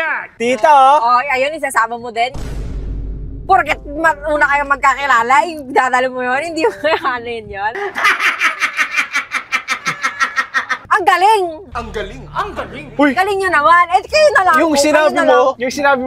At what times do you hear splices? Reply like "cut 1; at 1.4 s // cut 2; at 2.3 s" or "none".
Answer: cut 1; at 12.8 s